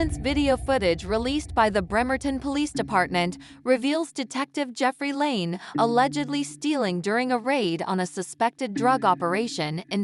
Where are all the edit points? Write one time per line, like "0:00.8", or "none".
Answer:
none